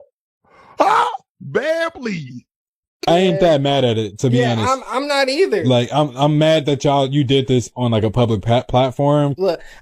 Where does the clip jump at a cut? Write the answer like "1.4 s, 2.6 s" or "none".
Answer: 3.0 s